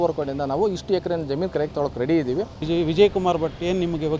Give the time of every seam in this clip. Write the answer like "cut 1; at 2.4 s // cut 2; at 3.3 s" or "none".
cut 1; at 2.6 s